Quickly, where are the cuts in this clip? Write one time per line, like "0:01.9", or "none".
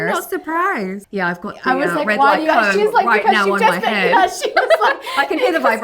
0:01.0

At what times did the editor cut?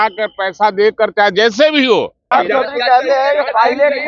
0:02.3

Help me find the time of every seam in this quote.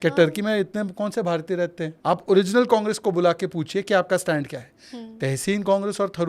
0:01.9

